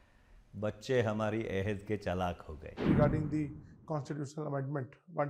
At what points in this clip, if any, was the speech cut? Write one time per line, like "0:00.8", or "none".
0:02.7